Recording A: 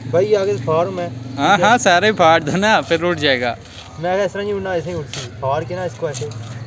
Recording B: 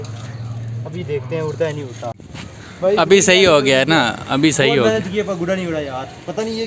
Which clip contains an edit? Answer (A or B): B